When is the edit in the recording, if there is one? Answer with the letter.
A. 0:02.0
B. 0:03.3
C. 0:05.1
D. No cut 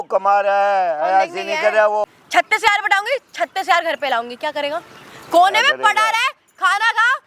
A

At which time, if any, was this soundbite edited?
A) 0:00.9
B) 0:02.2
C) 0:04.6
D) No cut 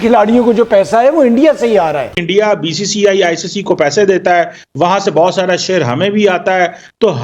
B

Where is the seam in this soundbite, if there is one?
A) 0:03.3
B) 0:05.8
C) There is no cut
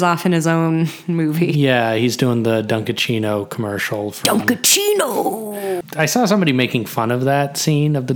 B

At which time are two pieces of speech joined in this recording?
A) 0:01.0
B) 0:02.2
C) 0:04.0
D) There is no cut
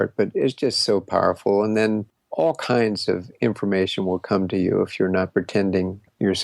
B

